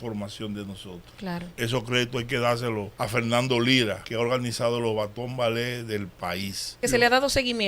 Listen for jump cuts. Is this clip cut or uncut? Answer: cut